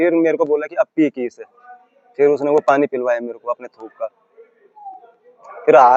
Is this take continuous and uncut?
yes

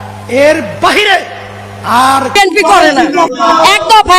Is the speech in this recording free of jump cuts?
no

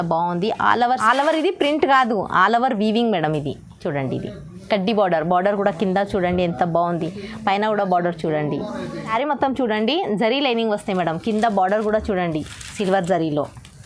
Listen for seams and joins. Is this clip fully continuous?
no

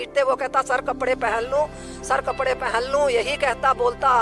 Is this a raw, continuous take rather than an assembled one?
yes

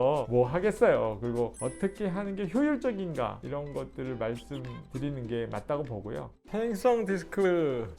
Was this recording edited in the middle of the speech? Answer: yes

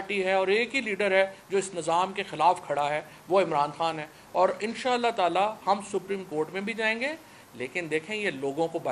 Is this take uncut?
yes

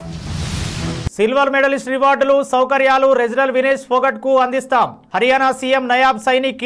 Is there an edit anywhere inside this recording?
yes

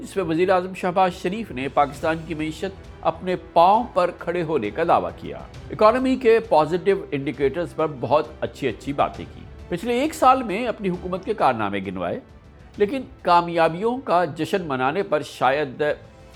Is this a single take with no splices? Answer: yes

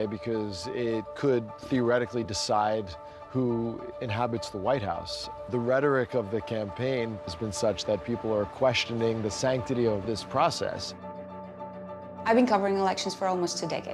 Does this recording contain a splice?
no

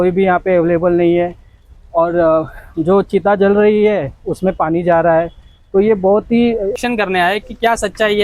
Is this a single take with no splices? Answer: no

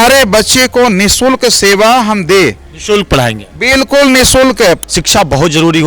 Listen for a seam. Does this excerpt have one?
yes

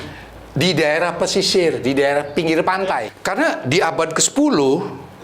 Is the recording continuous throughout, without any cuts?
no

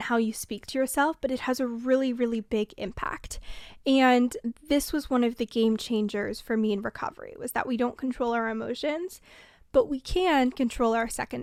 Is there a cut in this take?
no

